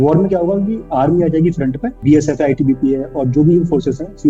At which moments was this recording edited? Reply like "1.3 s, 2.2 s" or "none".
1.9 s